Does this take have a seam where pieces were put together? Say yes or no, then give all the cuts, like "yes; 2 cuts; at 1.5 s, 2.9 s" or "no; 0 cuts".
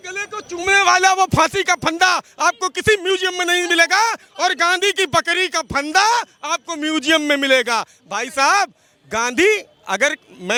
no; 0 cuts